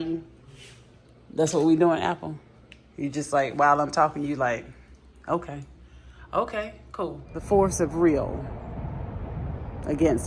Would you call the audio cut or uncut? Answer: cut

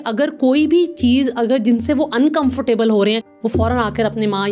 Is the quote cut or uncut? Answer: uncut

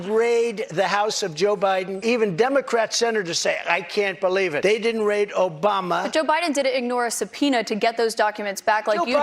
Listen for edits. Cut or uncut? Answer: cut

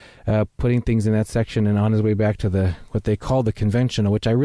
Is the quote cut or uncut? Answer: cut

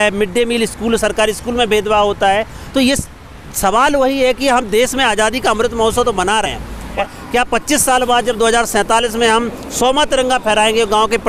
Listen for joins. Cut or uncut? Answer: uncut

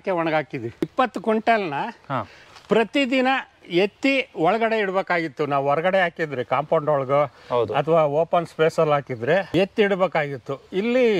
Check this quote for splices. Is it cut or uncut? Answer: cut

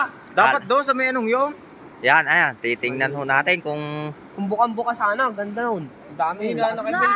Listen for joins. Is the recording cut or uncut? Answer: uncut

